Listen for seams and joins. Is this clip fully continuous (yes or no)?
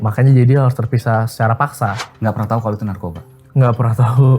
no